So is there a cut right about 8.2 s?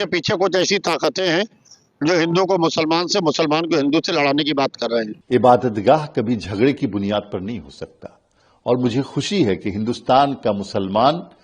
no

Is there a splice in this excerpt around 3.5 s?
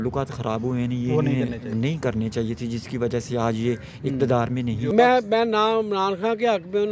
no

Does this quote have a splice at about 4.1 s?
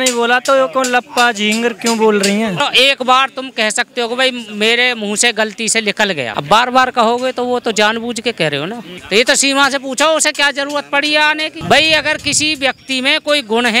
no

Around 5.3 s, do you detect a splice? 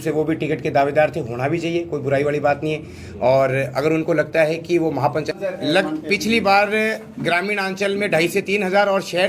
yes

